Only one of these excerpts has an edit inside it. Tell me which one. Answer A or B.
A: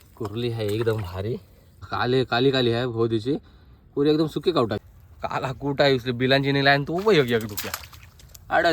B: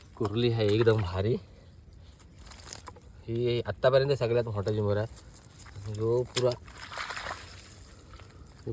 A